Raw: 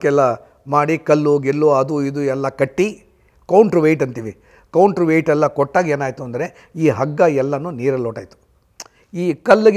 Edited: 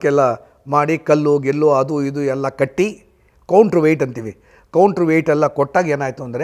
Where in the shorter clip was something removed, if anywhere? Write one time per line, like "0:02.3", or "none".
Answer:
none